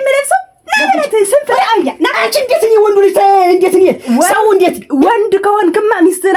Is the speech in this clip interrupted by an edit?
no; 0 cuts

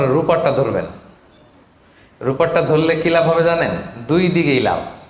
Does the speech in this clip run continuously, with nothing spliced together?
yes; 0 cuts

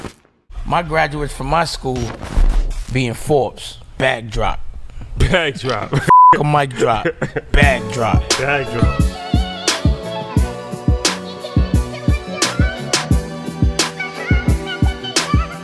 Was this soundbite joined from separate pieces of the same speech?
no; 0 cuts

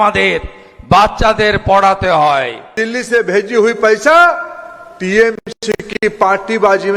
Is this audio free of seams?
no; 1 cut; at 2.8 s

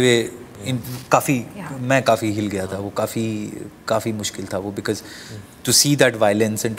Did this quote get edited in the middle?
no; 0 cuts

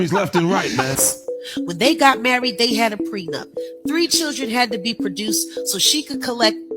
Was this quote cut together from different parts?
yes; 1 cut; at 0.9 s

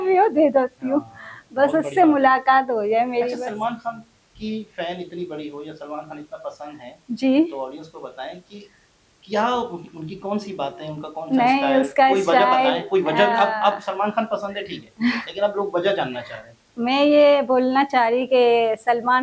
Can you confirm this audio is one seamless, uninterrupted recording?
yes; 0 cuts

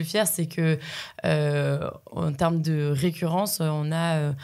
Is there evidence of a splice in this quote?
no; 0 cuts

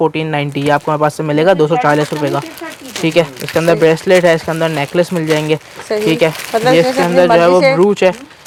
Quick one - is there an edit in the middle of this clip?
no; 0 cuts

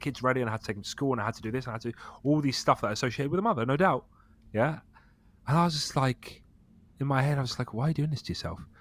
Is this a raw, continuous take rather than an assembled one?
yes; 0 cuts

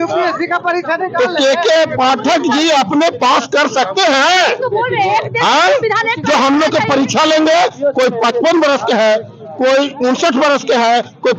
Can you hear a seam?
no; 0 cuts

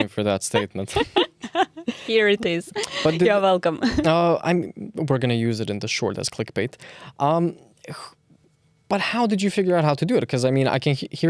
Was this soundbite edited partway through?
no; 0 cuts

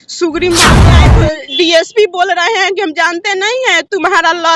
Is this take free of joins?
no; 1 cut; at 1.0 s

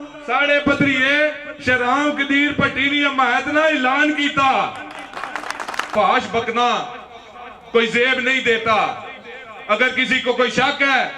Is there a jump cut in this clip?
yes; 1 cut; at 5.9 s

